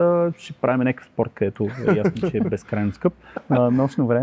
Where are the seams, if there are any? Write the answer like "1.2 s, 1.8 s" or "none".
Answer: 3.3 s

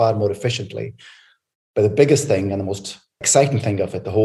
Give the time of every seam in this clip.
3.2 s

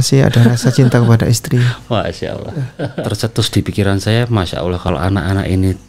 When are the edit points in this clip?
2.9 s, 4.8 s

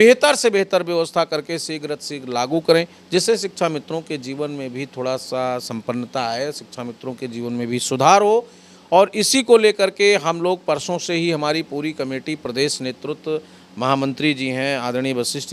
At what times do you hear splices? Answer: none

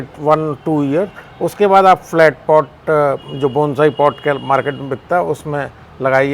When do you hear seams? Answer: none

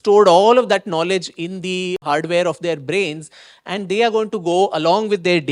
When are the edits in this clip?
2.0 s

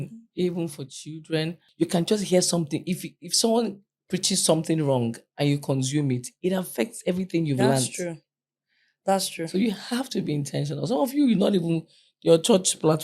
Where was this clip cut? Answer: 1.6 s

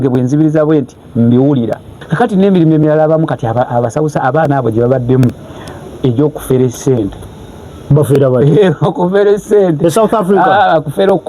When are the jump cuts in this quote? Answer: 2.0 s

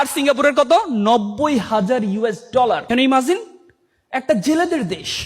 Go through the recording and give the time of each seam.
2.8 s

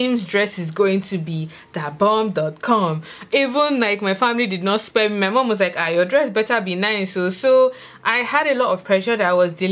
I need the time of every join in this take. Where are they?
none

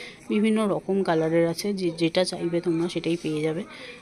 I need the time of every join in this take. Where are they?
none

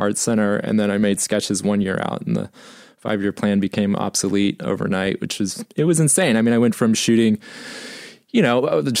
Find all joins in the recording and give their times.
none

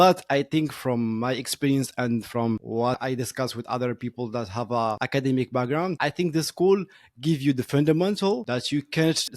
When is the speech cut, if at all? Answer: none

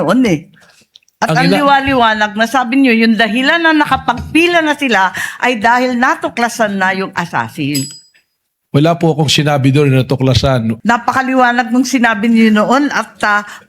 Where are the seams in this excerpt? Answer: 10.7 s

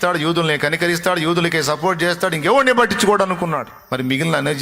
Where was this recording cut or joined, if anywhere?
3.7 s

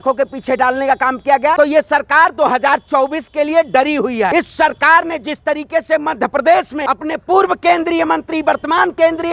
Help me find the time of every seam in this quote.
1.6 s, 4.3 s, 6.8 s

